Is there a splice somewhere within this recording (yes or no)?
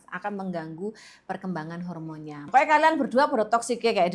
yes